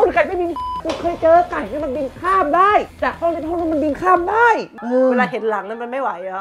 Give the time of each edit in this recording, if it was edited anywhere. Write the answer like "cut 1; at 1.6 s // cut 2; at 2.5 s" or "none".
cut 1; at 4.8 s